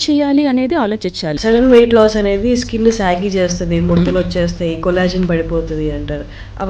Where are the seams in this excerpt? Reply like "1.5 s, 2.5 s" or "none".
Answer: 1.3 s